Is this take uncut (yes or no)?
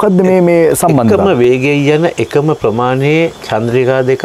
yes